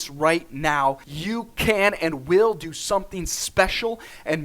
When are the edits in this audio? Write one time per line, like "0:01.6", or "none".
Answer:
0:01.1